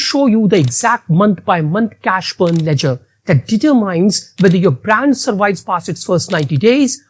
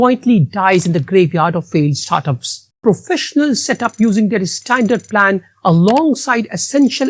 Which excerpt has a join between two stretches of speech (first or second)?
second